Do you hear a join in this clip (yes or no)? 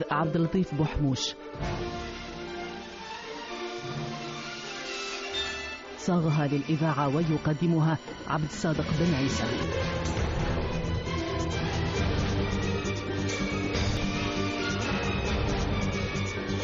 yes